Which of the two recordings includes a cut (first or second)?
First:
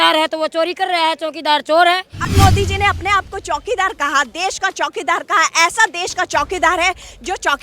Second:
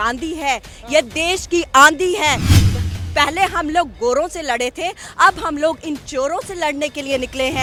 first